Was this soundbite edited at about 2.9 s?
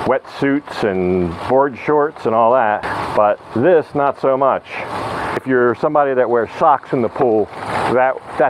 yes; 2 cuts; at 2.9 s, 5.4 s

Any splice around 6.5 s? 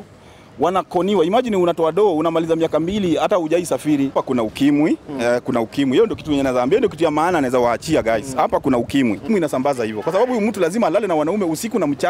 no; 2 cuts; at 4.1 s, 9.3 s

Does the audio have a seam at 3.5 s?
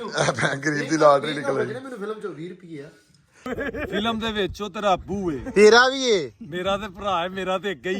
yes; 1 cut; at 3.5 s

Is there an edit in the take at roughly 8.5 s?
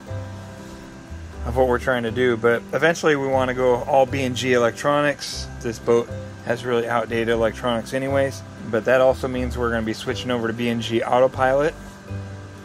yes; 2 cuts; at 5.7 s, 8.5 s

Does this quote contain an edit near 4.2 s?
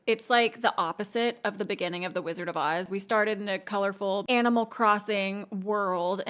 yes; 2 cuts; at 2.9 s, 4.2 s

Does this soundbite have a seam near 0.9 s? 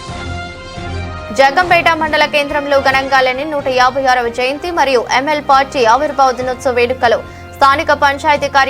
yes; 1 cut; at 0.9 s

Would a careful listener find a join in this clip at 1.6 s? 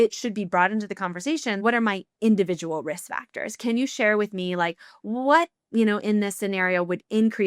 yes; 1 cut; at 1.6 s

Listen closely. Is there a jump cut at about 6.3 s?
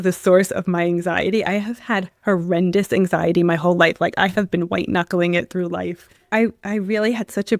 yes; 1 cut; at 6.3 s

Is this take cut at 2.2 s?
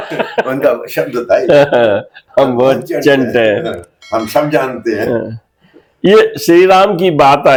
no; 0 cuts

